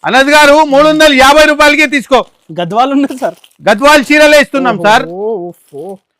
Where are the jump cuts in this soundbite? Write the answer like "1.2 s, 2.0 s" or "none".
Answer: none